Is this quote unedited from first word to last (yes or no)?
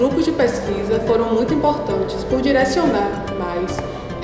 yes